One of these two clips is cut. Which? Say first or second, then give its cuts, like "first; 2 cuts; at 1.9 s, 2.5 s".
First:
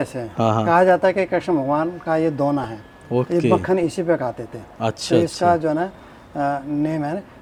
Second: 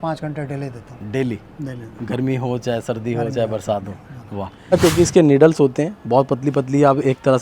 second; 1 cut; at 4.7 s